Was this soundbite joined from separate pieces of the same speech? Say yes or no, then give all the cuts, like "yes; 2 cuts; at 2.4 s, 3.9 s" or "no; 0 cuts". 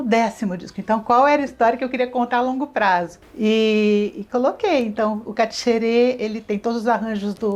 no; 0 cuts